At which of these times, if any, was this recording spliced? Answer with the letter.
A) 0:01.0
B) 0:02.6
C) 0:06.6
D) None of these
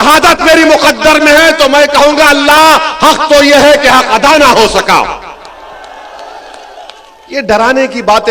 D